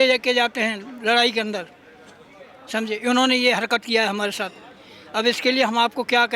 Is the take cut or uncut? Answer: uncut